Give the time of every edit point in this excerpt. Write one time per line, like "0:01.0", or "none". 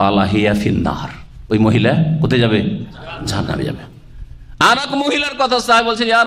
none